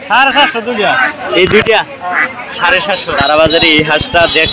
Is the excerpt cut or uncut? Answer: cut